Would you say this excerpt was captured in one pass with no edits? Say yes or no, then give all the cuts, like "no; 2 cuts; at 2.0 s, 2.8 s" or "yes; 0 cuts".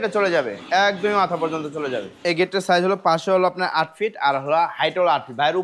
no; 1 cut; at 2.2 s